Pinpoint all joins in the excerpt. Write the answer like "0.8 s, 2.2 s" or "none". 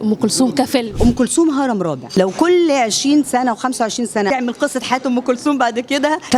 1.0 s, 2.0 s, 4.3 s